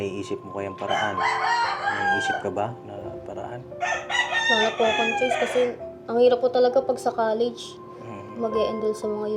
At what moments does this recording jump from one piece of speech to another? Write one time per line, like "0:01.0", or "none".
none